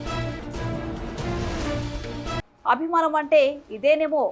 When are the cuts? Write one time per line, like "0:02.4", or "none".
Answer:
none